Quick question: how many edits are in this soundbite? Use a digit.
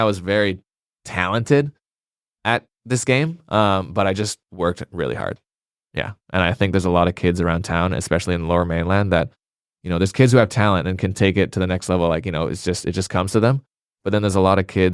0